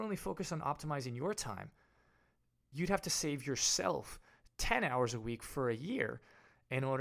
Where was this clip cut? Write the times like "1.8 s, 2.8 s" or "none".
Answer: 2.7 s